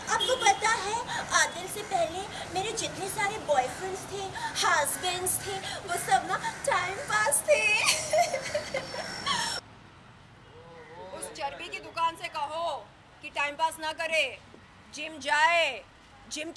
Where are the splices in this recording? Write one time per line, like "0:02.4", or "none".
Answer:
0:09.6